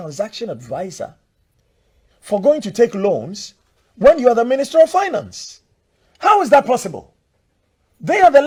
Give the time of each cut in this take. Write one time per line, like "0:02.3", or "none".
none